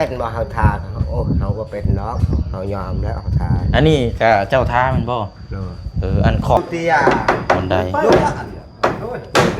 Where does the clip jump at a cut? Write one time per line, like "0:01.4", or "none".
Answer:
0:06.6

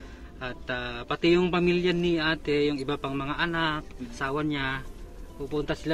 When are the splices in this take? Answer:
0:04.2

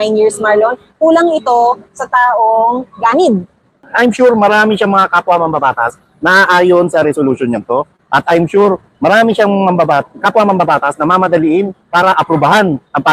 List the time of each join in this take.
0:03.8

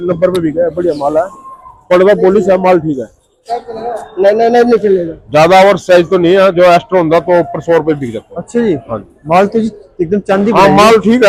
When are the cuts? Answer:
none

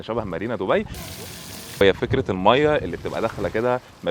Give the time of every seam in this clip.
0:01.1

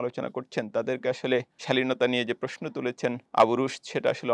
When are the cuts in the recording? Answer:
0:03.2

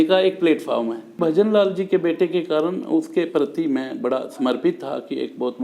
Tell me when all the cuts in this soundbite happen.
0:01.2

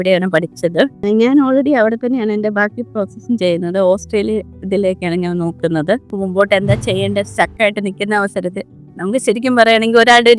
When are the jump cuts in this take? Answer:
0:01.0
0:06.1

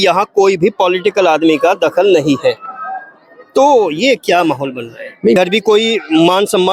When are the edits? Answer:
0:05.4

